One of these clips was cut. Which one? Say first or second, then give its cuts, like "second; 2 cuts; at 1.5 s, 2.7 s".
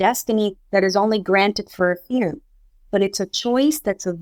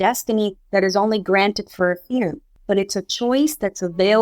second; 1 cut; at 2.5 s